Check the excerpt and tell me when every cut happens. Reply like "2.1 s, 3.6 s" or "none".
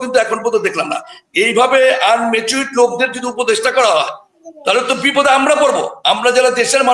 none